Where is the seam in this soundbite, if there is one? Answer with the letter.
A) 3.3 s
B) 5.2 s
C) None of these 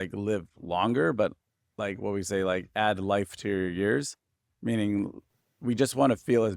B